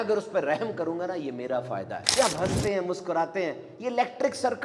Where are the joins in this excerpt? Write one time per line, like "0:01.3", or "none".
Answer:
0:02.0